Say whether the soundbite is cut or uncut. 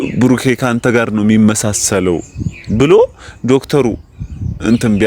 uncut